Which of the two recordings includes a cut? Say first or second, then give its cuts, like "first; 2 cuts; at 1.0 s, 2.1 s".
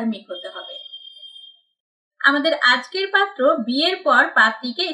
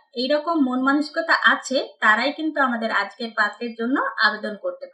first; 1 cut; at 2.1 s